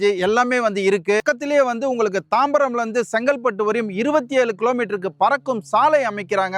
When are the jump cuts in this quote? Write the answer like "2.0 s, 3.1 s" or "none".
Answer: none